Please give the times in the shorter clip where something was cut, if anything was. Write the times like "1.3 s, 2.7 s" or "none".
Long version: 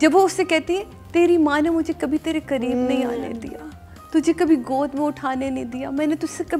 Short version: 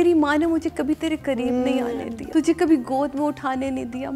2.1 s